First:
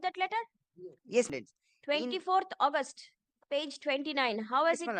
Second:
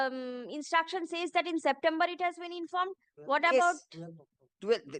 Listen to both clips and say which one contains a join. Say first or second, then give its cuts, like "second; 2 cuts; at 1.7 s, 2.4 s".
first; 1 cut; at 1.3 s